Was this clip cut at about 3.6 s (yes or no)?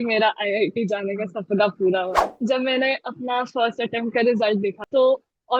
no